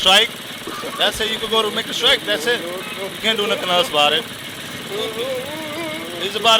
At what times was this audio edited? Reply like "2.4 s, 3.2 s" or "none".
none